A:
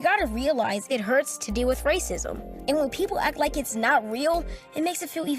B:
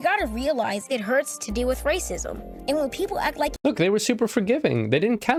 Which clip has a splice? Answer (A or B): A